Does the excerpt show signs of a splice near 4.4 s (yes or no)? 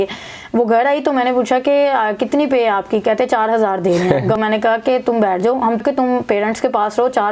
yes